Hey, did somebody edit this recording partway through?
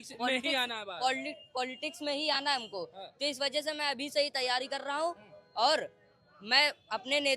no; 0 cuts

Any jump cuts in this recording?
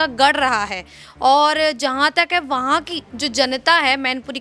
no; 0 cuts

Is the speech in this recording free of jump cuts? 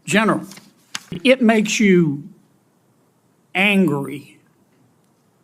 no; 1 cut; at 1.2 s

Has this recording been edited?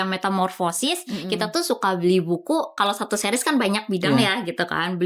yes; 1 cut; at 2.7 s

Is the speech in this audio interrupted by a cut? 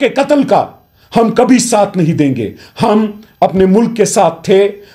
no; 0 cuts

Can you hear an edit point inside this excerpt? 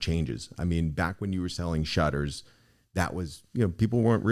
no; 0 cuts

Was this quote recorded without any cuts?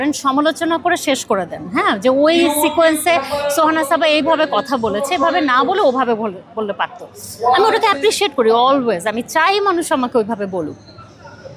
yes; 0 cuts

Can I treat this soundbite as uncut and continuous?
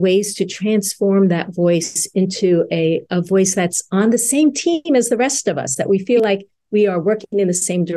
yes; 0 cuts

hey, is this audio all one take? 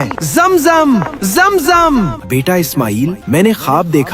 no; 1 cut; at 2.2 s

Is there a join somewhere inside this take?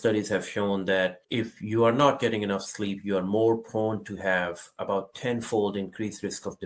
yes; 1 cut; at 1.2 s

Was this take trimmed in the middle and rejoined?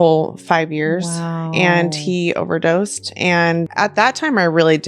yes; 1 cut; at 3.7 s

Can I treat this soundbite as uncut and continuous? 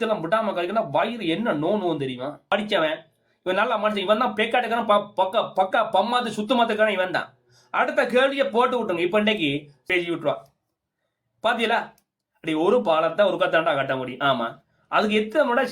no; 2 cuts; at 2.5 s, 9.9 s

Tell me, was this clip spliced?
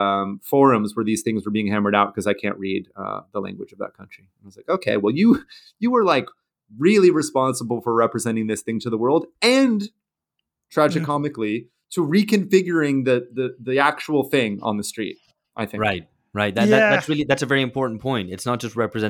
no; 0 cuts

